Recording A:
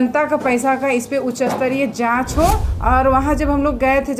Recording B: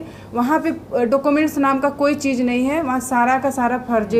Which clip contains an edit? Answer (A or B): A